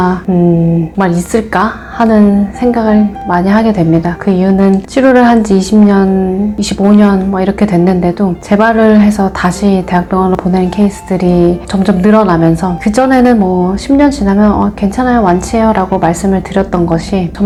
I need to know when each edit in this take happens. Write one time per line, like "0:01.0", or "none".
none